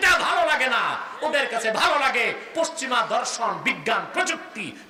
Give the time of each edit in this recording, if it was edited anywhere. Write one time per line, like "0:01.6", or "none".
none